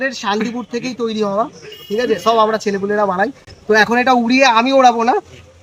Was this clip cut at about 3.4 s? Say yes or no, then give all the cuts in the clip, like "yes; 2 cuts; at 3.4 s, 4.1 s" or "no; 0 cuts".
no; 0 cuts